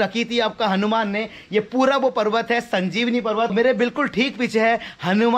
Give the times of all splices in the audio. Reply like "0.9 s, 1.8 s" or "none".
3.5 s